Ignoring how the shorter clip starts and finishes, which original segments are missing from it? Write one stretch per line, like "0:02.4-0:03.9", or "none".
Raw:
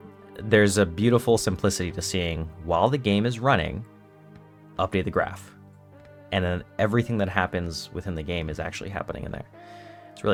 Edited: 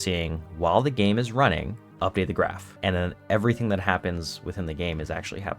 0:03.9-0:04.6
0:05.4-0:06.1